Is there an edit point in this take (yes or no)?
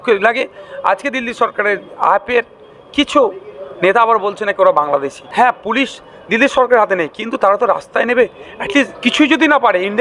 yes